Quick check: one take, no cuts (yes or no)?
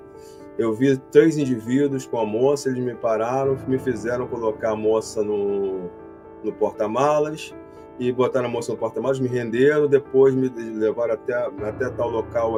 yes